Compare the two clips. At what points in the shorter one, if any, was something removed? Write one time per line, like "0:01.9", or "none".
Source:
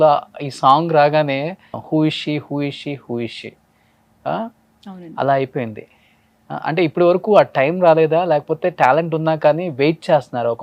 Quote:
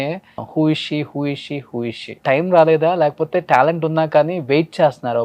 0:02.2